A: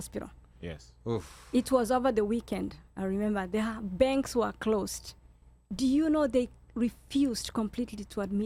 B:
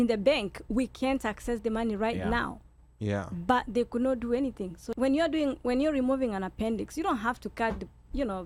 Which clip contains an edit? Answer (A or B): B